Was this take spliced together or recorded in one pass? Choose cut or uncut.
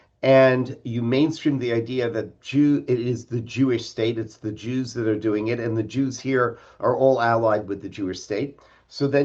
uncut